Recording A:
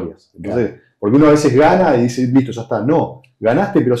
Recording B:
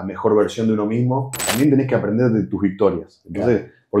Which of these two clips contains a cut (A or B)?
B